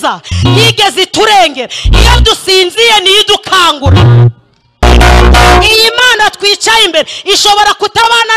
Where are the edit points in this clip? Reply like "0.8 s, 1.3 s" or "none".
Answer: 4.8 s